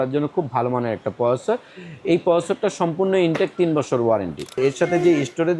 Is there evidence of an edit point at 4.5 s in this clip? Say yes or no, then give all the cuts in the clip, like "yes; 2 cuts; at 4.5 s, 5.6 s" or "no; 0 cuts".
yes; 1 cut; at 4.5 s